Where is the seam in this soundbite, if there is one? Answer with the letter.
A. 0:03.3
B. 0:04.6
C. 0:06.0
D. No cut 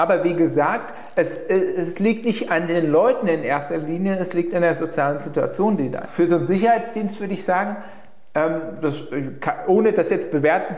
C